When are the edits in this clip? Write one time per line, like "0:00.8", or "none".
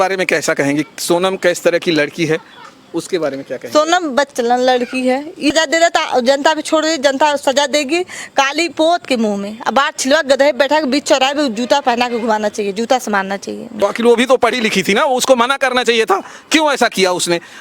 0:05.5
0:13.7